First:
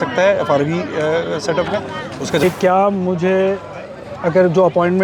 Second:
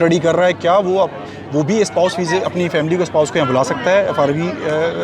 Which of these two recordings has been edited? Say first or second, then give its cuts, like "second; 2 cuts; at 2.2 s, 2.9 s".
first; 1 cut; at 2.4 s